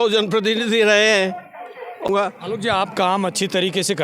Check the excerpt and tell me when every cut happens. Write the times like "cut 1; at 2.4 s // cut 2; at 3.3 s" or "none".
cut 1; at 2.1 s